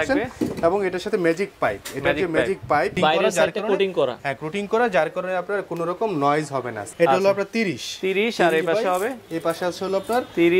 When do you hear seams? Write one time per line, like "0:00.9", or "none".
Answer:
0:02.9
0:06.8